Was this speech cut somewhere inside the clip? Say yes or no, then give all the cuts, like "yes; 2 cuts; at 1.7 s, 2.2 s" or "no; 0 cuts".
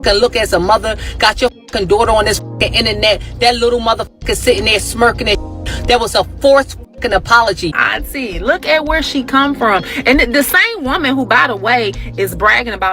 yes; 1 cut; at 7.8 s